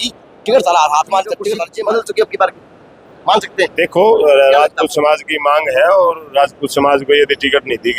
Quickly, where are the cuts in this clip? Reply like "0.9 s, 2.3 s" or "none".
1.7 s